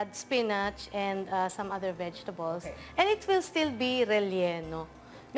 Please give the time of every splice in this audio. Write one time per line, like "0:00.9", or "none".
0:04.2